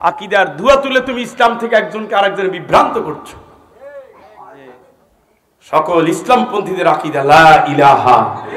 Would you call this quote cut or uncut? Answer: uncut